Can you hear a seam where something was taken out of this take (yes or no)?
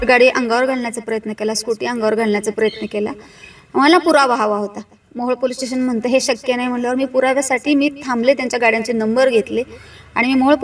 no